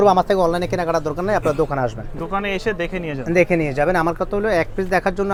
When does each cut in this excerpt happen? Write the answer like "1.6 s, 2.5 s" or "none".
none